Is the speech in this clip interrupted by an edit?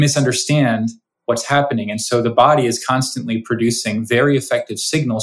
no; 0 cuts

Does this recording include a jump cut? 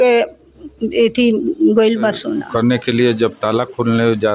yes; 1 cut; at 2.4 s

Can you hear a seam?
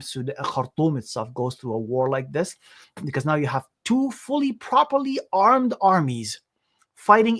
no; 0 cuts

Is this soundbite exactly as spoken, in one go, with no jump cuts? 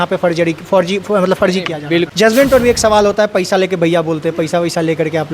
no; 1 cut; at 2.1 s

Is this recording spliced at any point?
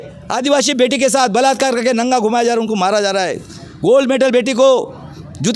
no; 0 cuts

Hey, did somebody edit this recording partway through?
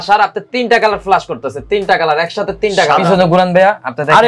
yes; 1 cut; at 3.1 s

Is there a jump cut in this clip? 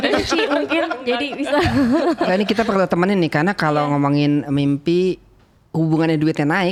no; 0 cuts

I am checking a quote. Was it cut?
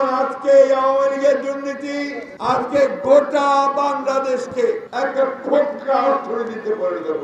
yes; 2 cuts; at 2.2 s, 4.9 s

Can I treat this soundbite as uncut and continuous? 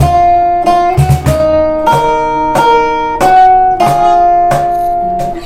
yes; 0 cuts

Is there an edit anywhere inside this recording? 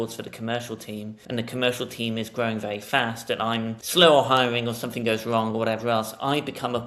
yes; 2 cuts; at 1.2 s, 3.8 s

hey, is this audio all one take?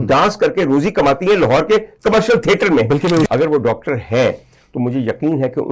no; 1 cut; at 3.2 s

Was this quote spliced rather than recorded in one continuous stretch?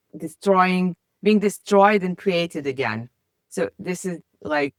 no; 0 cuts

